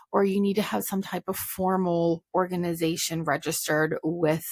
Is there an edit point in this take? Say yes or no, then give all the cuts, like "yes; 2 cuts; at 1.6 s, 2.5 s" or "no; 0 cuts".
no; 0 cuts